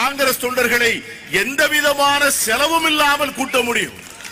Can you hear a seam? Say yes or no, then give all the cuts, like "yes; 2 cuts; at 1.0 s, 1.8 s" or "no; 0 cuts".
no; 0 cuts